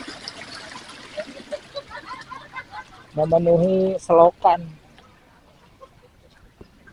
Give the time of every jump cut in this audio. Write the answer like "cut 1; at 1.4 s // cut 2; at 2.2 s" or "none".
none